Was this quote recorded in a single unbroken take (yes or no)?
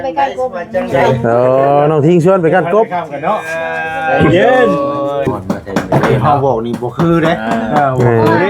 no